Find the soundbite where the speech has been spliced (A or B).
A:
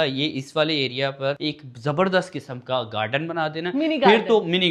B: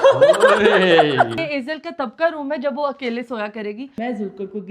B